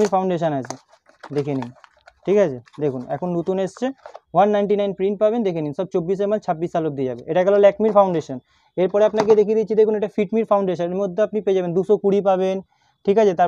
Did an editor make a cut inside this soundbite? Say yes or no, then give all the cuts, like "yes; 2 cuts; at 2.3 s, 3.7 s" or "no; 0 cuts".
no; 0 cuts